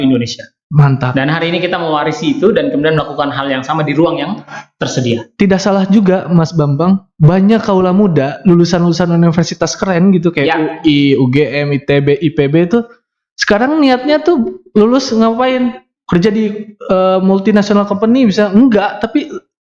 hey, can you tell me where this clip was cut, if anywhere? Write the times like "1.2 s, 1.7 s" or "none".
none